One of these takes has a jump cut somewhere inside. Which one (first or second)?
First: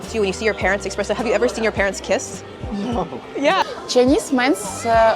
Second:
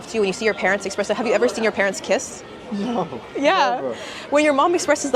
first